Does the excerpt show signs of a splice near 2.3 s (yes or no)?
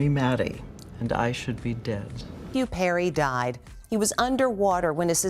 yes